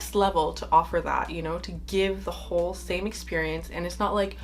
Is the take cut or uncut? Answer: uncut